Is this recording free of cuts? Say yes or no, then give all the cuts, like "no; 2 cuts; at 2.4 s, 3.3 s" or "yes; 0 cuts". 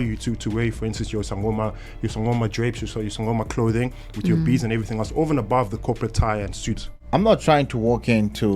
no; 1 cut; at 6.9 s